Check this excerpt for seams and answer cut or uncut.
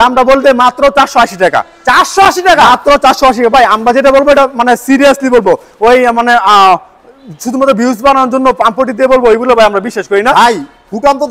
uncut